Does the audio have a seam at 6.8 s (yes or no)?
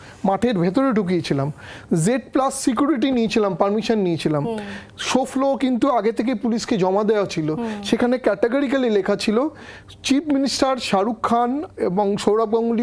no